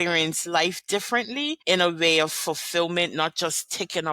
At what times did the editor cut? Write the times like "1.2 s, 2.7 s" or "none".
1.6 s